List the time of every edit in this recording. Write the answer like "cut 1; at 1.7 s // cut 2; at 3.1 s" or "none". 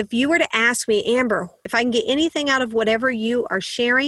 cut 1; at 1.6 s